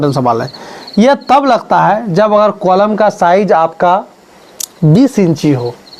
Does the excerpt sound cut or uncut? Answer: uncut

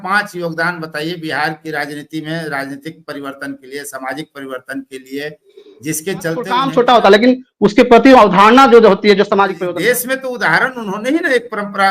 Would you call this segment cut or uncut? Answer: cut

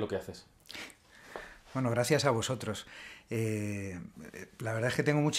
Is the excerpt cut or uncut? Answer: cut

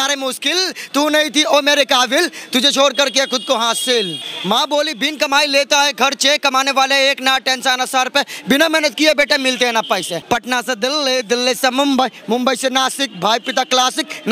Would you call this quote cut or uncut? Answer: cut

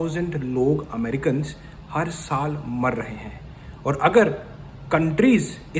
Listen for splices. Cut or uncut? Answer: uncut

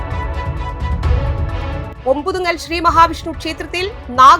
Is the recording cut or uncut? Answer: cut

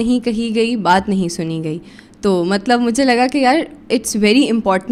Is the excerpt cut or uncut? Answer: uncut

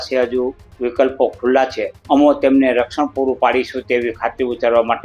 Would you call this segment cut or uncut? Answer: cut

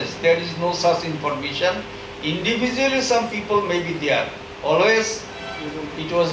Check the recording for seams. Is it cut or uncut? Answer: uncut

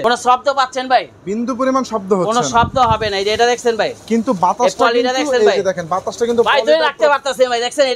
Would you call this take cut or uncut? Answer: uncut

